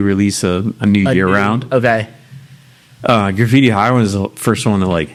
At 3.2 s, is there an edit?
no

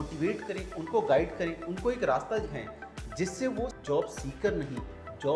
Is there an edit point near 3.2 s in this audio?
yes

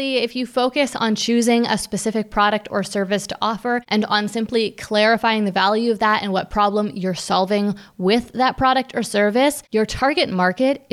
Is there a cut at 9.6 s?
yes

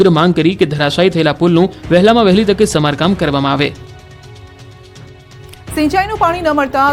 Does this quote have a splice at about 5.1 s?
no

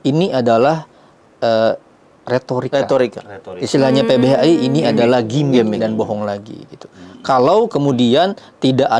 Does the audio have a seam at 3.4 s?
no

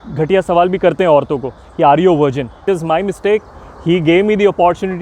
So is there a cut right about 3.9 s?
no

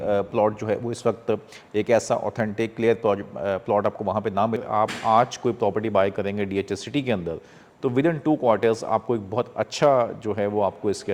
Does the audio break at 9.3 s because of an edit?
no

